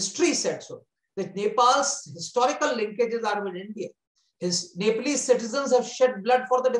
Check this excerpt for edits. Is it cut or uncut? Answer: uncut